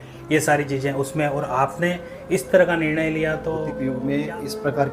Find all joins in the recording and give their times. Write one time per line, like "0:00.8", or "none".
0:03.7